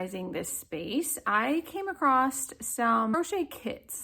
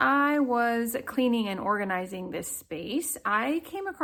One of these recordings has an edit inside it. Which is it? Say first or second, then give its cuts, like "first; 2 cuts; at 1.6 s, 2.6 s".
first; 1 cut; at 3.1 s